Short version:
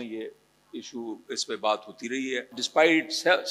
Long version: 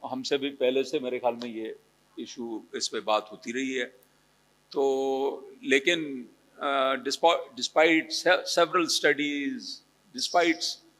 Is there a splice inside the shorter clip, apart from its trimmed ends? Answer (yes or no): yes